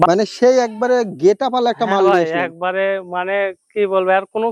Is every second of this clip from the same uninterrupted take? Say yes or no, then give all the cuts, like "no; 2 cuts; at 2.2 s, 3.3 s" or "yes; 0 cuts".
yes; 0 cuts